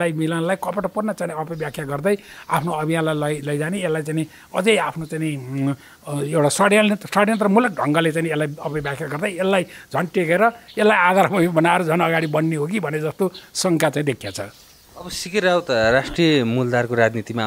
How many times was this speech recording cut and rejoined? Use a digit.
0